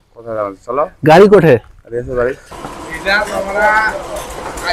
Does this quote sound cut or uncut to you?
cut